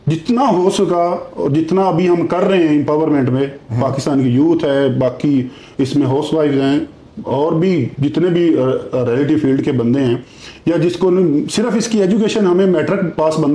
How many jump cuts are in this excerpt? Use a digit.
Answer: 0